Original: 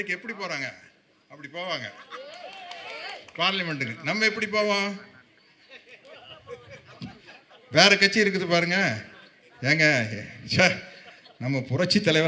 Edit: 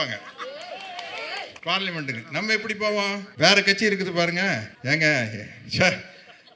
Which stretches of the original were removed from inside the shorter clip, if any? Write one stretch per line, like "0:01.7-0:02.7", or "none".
0:05.0-0:07.6
0:09.1-0:09.5